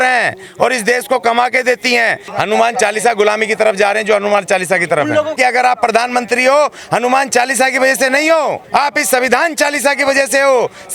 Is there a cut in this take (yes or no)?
yes